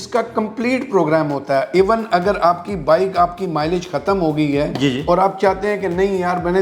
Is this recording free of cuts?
yes; 0 cuts

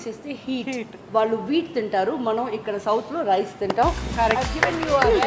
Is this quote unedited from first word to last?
no; 1 cut; at 0.9 s

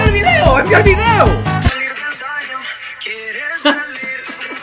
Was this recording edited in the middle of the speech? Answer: yes; 1 cut; at 1.8 s

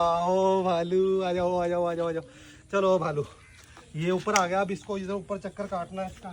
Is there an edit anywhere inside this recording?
no; 0 cuts

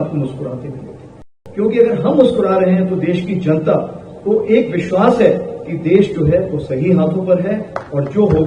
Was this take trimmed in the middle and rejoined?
yes; 1 cut; at 1.3 s

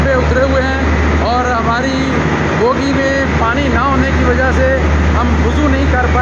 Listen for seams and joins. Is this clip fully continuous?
yes; 0 cuts

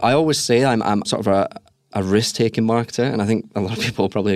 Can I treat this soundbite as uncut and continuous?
no; 1 cut; at 1.1 s

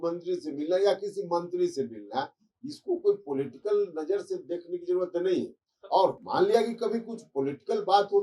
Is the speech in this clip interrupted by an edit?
no; 0 cuts

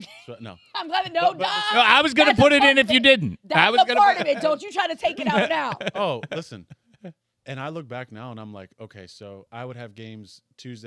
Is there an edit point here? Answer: no; 0 cuts

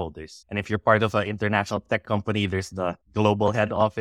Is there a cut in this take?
no; 0 cuts

